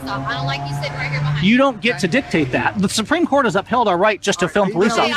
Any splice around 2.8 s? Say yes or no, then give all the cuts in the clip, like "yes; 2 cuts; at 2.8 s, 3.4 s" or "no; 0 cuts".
yes; 1 cut; at 2.8 s